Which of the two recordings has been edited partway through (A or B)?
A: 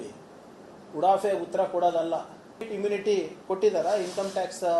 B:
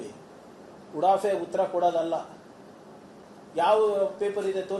A